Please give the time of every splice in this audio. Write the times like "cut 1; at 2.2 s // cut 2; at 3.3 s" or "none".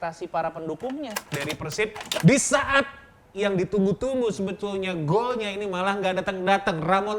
cut 1; at 1.2 s